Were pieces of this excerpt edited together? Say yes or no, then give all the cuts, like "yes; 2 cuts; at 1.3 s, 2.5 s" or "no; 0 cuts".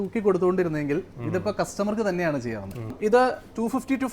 yes; 1 cut; at 3.0 s